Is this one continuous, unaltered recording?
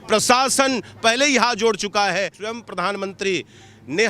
no; 1 cut; at 2.4 s

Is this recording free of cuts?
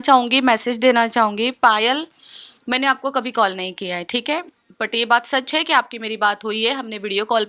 yes; 0 cuts

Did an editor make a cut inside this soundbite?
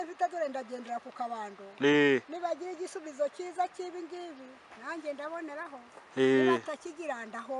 no; 0 cuts

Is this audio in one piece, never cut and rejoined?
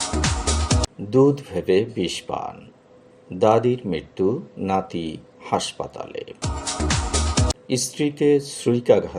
no; 1 cut; at 0.9 s

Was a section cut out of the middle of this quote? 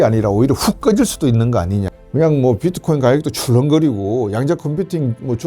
yes; 1 cut; at 2.0 s

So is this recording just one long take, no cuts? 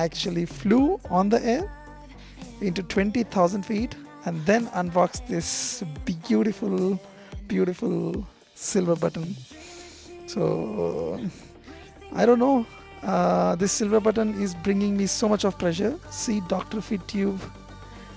yes; 0 cuts

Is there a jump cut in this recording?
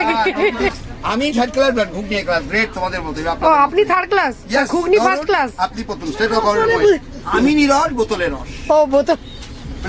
yes; 2 cuts; at 0.7 s, 6.6 s

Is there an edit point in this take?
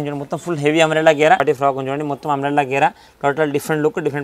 yes; 1 cut; at 1.4 s

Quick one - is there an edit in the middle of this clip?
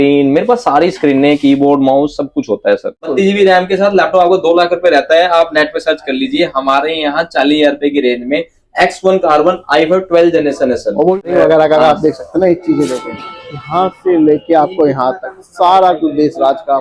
yes; 2 cuts; at 3.1 s, 11.2 s

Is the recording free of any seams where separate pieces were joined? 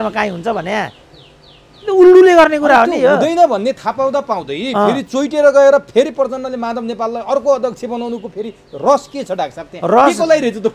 yes; 0 cuts

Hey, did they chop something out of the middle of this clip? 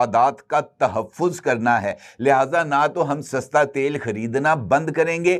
no; 0 cuts

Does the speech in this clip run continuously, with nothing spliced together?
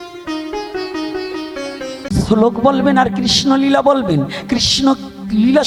no; 1 cut; at 2.1 s

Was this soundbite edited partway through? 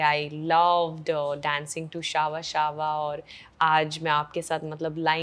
no; 0 cuts

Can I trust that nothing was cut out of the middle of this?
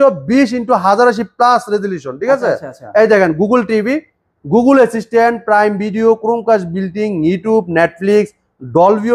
yes; 0 cuts

